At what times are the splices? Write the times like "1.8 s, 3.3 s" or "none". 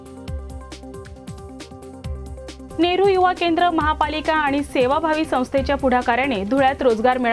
1.5 s